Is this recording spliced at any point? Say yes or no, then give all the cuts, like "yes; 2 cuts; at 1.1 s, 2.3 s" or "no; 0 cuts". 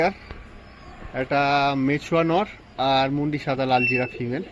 no; 0 cuts